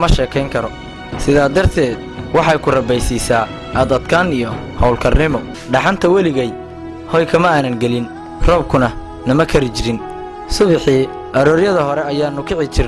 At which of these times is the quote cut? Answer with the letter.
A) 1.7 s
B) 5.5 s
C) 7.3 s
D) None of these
B